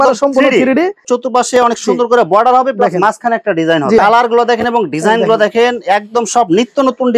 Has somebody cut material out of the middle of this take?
yes; 2 cuts; at 1.0 s, 4.0 s

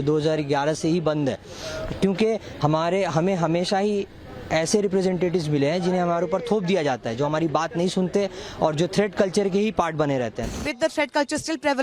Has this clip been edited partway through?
yes; 1 cut; at 10.5 s

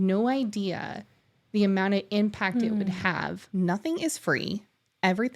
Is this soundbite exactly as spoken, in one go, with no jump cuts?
no; 1 cut; at 3.4 s

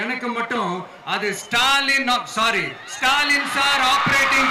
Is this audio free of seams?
yes; 0 cuts

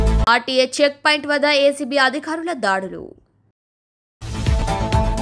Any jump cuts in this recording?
no; 0 cuts

